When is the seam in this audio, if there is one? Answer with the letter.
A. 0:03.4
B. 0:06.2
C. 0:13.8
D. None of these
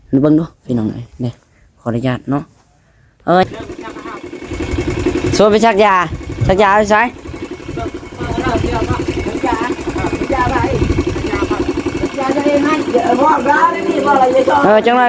A